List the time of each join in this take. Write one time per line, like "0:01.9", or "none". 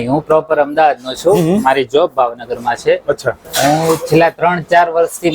0:03.4